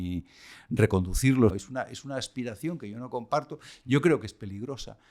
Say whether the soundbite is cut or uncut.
cut